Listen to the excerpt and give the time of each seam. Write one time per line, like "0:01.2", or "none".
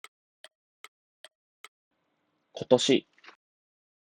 0:01.8